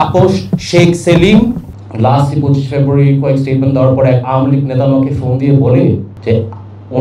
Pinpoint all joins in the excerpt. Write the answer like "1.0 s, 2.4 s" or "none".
1.6 s